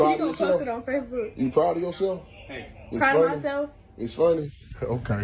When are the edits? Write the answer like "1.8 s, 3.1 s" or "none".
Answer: none